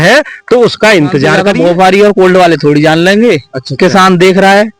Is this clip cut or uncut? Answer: cut